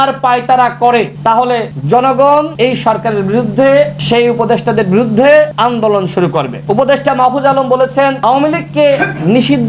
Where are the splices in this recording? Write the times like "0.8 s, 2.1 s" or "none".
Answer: 1.2 s, 2.5 s, 4.0 s, 5.5 s, 6.6 s